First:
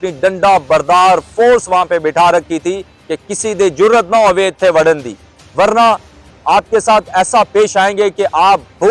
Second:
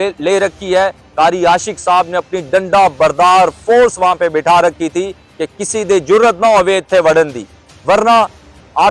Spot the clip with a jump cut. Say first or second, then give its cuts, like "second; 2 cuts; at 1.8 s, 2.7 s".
second; 1 cut; at 1.0 s